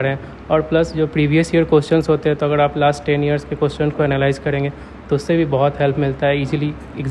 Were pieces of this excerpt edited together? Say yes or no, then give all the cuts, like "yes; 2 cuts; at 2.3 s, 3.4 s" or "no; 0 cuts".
no; 0 cuts